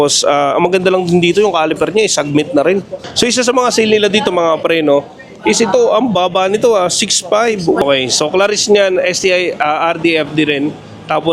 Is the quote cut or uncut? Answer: cut